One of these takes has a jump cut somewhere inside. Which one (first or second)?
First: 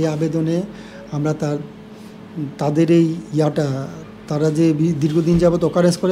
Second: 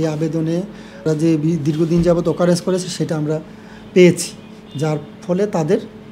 second